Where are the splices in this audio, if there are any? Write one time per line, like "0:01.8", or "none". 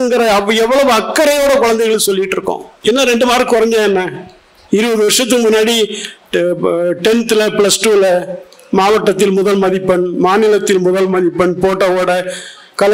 0:02.7